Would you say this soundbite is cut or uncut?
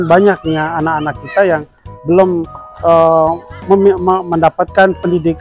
uncut